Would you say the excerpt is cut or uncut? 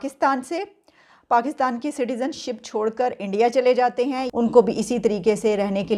cut